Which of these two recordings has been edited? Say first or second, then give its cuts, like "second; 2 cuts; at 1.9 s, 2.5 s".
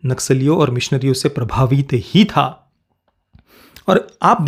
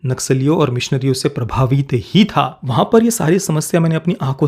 second; 1 cut; at 2.6 s